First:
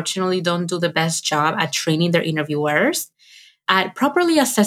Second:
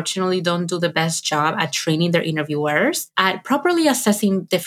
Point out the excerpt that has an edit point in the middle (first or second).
second